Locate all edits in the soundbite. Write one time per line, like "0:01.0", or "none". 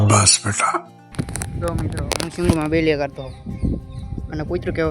0:01.0